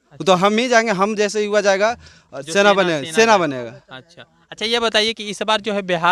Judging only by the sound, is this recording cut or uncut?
uncut